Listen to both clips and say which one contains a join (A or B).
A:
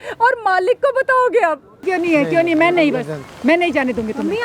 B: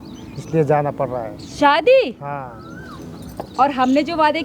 A